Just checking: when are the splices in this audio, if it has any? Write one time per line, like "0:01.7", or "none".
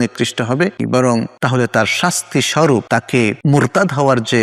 0:01.4
0:03.2

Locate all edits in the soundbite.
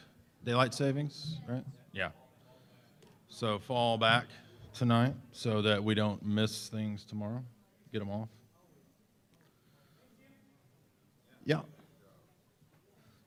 none

